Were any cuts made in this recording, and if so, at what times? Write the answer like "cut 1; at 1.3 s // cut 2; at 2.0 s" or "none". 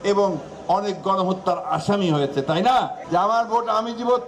cut 1; at 3.0 s